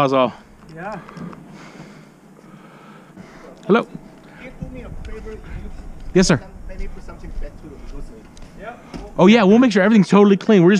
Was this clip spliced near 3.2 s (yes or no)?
yes